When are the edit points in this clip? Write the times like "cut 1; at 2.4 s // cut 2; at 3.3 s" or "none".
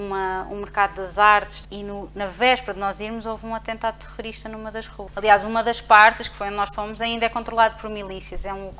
cut 1; at 1.6 s // cut 2; at 5.1 s